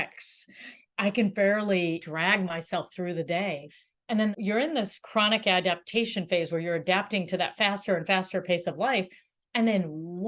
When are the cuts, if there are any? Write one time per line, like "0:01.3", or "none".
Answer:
0:02.0
0:04.0